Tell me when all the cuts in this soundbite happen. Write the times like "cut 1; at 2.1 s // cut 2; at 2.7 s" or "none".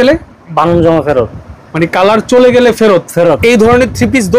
cut 1; at 3.4 s